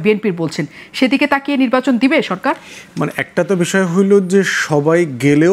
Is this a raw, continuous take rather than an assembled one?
yes; 0 cuts

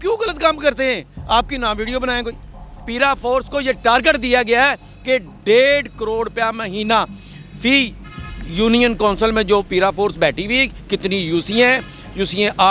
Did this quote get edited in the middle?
yes; 1 cut; at 2.8 s

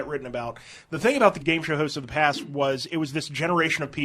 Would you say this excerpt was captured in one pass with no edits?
no; 1 cut; at 1.4 s

